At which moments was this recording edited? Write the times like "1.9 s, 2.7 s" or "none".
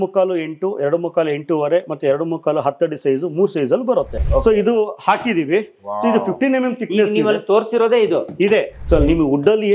4.2 s, 8.8 s